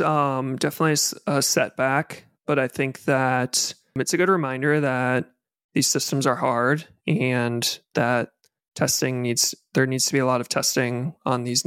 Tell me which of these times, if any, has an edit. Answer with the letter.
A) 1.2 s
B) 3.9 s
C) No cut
B